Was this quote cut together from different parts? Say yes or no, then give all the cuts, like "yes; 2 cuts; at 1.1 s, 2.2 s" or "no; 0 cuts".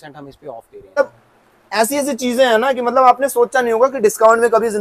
yes; 1 cut; at 1.0 s